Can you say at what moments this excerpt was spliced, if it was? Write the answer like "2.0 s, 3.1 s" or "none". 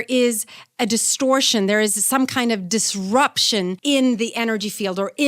3.8 s